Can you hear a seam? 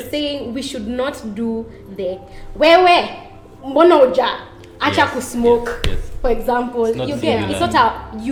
no; 0 cuts

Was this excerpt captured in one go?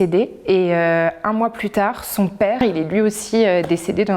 no; 1 cut; at 2.6 s

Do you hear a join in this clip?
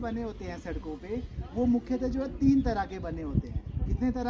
no; 0 cuts

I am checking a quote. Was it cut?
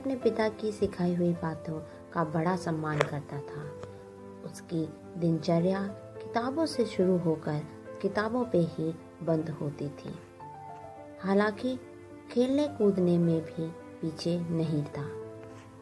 no; 0 cuts

